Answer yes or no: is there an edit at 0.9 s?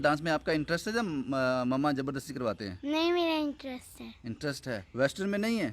no